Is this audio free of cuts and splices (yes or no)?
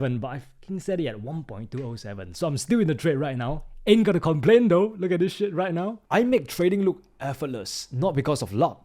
no